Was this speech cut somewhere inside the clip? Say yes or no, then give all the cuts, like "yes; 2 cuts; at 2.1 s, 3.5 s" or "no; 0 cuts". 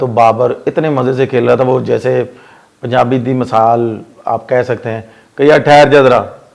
no; 0 cuts